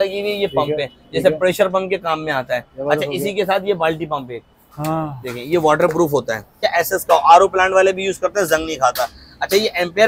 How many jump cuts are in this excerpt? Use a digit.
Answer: 1